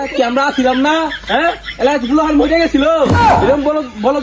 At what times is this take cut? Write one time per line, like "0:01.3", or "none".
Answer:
none